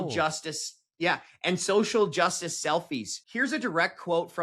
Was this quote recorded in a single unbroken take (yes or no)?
no